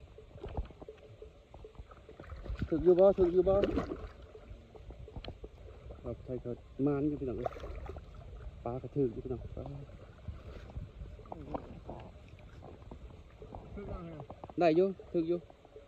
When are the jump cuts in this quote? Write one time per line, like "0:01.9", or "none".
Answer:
0:05.6

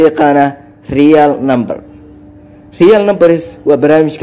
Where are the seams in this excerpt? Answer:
none

